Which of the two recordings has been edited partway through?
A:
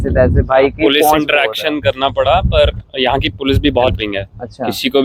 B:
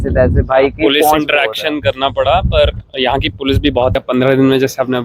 B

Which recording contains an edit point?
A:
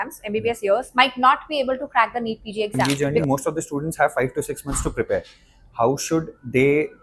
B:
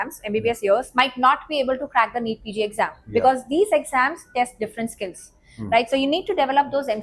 A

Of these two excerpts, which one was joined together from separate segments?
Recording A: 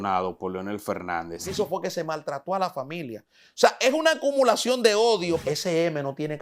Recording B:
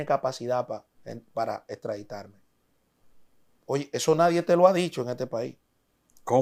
A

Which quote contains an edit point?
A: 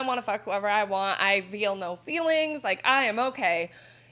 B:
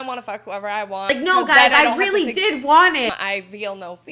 B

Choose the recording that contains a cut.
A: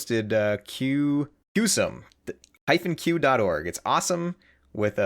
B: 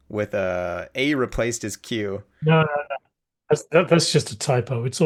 A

